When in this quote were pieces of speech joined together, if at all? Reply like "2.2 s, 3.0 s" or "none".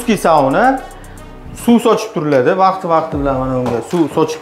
none